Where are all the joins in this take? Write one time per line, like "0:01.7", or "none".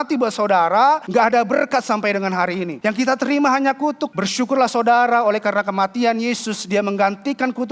0:01.0
0:02.7
0:04.1